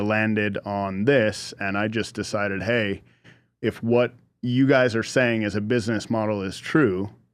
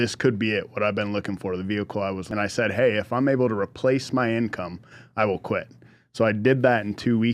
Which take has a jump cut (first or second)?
second